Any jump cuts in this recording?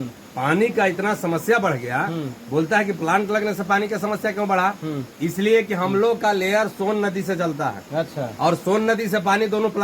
no; 0 cuts

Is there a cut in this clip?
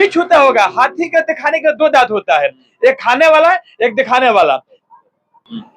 no; 0 cuts

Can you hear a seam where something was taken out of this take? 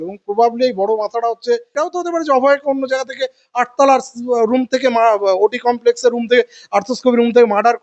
yes; 1 cut; at 1.8 s

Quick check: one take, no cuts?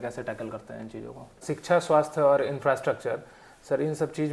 no; 1 cut; at 1.4 s

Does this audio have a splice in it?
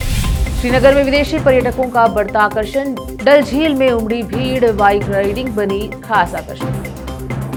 no; 0 cuts

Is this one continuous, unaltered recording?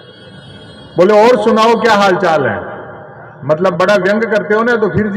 yes; 0 cuts

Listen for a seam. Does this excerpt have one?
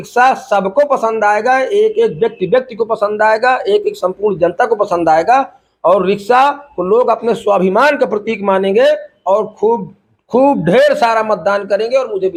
no; 0 cuts

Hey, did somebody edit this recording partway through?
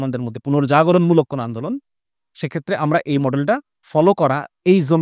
yes; 1 cut; at 3.8 s

